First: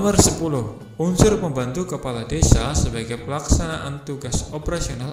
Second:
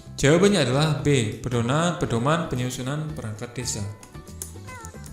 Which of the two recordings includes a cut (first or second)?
second